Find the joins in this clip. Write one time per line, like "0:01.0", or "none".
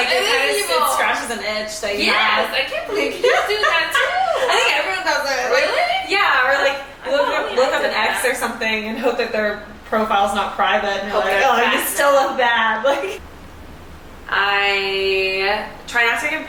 none